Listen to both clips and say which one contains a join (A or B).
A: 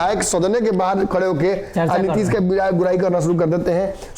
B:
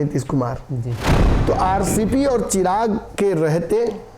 B